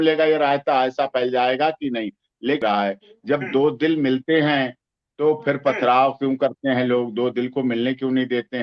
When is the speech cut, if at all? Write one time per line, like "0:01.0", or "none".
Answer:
0:02.6

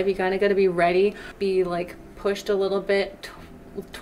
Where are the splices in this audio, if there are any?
0:01.3

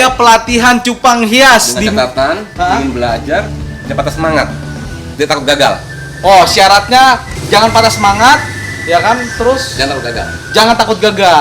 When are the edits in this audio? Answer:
0:07.3

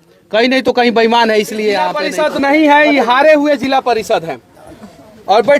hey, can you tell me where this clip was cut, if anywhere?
0:02.0

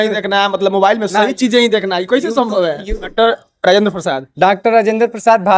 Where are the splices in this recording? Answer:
0:02.9

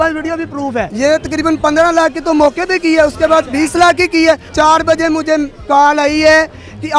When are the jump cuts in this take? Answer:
0:00.9
0:04.5

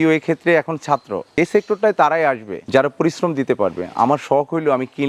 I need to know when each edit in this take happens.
0:01.3

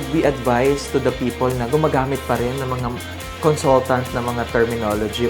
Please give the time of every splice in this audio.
none

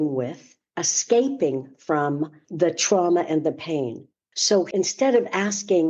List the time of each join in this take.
0:02.4
0:04.4

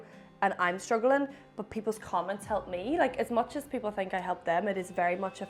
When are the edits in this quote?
none

